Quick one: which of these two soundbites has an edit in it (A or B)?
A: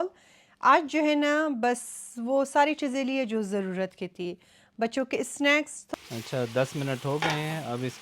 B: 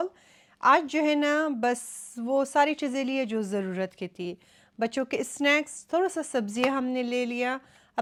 A